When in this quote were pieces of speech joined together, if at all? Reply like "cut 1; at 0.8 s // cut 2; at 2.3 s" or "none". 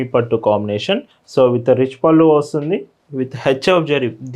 cut 1; at 1.2 s